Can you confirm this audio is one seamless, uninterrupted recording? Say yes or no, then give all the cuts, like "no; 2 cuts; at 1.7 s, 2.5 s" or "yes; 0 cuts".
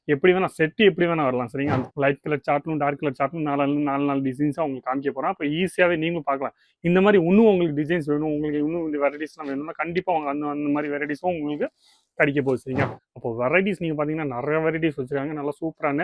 no; 2 cuts; at 1.9 s, 13.0 s